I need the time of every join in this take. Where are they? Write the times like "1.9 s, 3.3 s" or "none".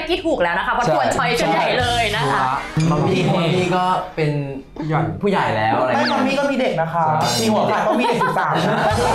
2.7 s

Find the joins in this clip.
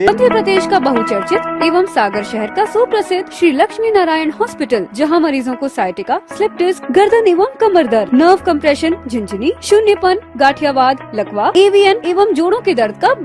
none

